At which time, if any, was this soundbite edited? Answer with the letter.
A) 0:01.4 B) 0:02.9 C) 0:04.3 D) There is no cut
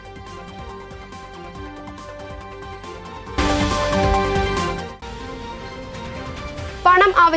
A